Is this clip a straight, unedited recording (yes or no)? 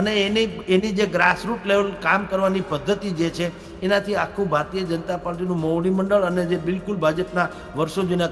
yes